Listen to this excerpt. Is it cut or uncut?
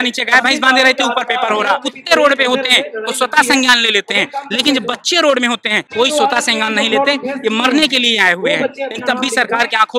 cut